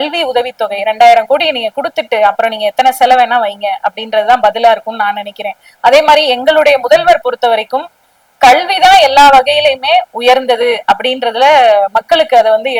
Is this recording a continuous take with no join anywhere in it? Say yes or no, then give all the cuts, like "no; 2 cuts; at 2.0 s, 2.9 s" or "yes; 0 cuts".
yes; 0 cuts